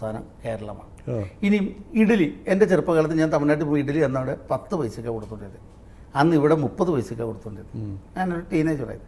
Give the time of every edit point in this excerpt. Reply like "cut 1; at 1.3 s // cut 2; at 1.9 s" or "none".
none